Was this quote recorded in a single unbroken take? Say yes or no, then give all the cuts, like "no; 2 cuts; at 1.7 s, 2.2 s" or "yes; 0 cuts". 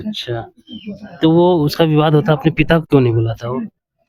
yes; 0 cuts